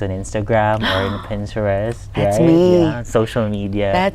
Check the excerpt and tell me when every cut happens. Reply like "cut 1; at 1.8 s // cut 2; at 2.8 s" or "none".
none